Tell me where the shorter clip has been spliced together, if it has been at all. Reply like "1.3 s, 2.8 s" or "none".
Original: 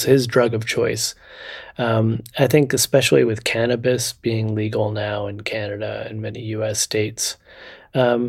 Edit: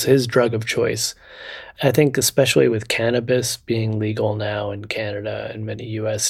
1.7 s